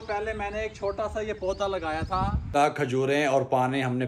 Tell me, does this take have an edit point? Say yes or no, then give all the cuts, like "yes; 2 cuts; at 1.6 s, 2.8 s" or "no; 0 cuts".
yes; 1 cut; at 2.5 s